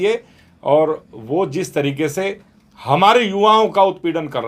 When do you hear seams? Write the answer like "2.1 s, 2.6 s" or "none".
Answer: none